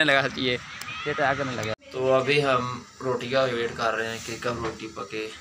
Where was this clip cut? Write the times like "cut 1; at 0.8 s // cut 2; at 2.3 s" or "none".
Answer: cut 1; at 1.7 s